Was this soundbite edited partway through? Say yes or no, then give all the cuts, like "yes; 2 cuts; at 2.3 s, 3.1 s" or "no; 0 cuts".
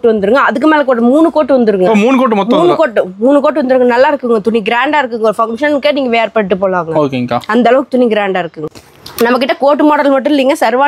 yes; 1 cut; at 8.6 s